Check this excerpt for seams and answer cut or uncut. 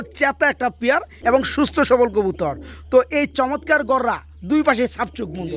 cut